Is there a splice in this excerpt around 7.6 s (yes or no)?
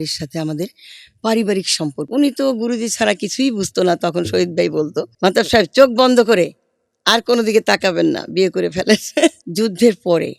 no